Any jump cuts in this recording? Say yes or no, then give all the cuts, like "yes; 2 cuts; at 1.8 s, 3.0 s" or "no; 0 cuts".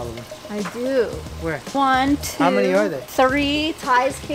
no; 0 cuts